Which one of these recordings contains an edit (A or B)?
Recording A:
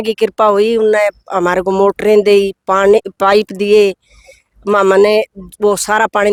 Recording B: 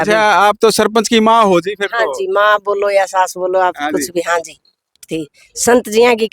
B